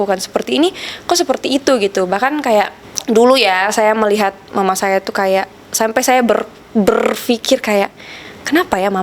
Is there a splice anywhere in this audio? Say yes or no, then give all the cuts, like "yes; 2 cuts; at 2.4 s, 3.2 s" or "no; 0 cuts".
no; 0 cuts